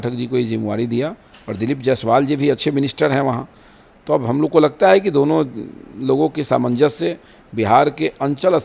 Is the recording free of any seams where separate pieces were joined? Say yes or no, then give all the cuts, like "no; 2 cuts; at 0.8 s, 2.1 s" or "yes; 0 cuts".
yes; 0 cuts